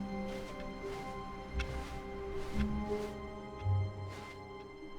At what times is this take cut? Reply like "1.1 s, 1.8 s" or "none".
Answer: none